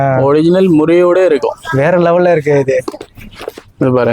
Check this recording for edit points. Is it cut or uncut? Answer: uncut